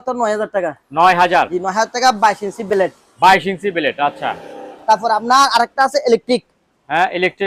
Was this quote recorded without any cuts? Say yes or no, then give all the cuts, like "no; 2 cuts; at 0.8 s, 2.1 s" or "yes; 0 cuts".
yes; 0 cuts